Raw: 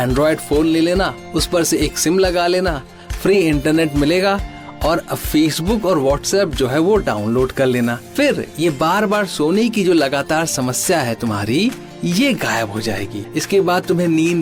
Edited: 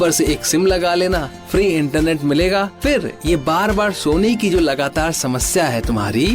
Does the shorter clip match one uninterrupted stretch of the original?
no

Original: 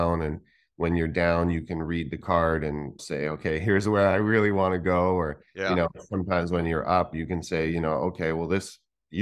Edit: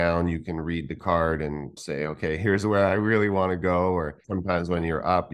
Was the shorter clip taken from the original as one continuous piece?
no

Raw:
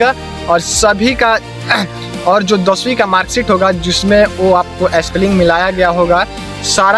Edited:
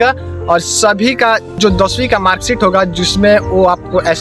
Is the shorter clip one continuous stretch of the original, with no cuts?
no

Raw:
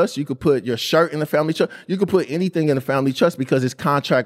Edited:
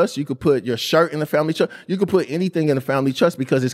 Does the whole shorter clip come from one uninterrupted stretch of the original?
yes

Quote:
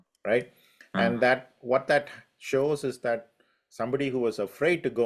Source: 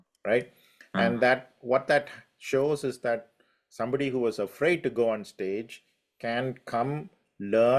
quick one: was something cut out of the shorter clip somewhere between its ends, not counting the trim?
no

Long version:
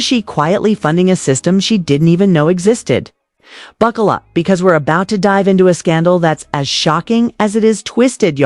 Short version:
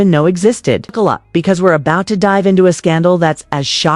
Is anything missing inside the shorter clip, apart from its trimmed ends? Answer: yes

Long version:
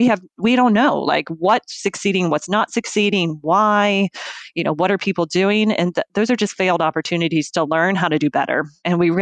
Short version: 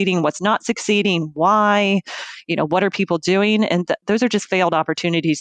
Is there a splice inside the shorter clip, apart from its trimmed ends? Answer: no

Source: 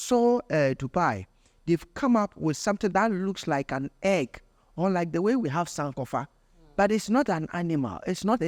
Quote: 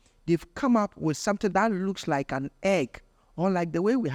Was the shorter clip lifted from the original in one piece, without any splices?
yes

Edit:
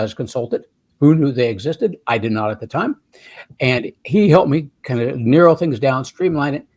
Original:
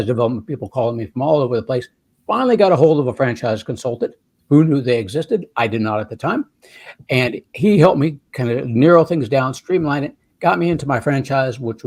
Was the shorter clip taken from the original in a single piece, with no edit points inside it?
yes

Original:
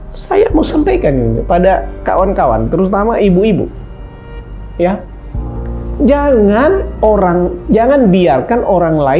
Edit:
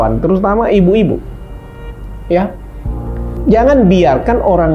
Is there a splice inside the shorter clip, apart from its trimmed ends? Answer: yes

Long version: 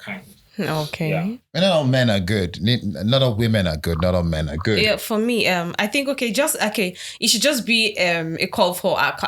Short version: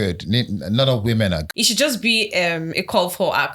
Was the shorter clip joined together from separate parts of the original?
yes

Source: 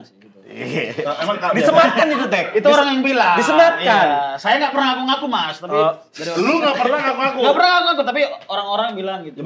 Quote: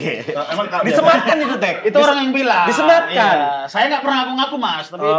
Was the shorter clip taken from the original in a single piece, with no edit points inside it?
yes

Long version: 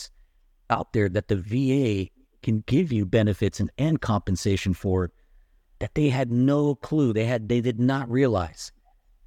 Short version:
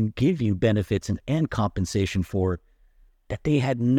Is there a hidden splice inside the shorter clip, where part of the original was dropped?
no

